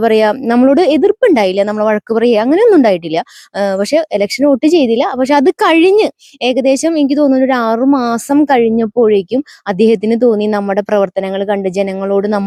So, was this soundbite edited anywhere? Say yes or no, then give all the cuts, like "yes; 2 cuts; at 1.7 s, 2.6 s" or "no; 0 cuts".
no; 0 cuts